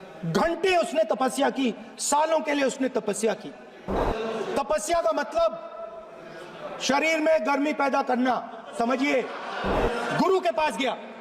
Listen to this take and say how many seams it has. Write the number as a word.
two